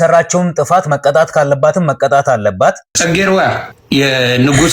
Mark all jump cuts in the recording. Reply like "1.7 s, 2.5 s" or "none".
2.9 s, 3.7 s